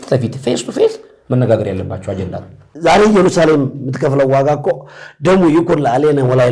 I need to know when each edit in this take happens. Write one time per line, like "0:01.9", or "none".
0:02.6